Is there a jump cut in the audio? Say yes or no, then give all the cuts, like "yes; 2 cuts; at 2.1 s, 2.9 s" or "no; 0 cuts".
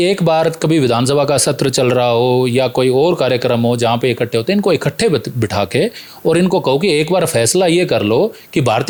no; 0 cuts